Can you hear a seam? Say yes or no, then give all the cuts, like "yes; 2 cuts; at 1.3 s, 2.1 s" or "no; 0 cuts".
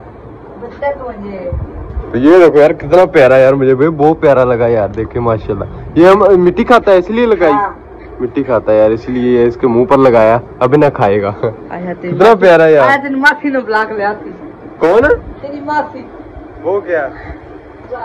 no; 0 cuts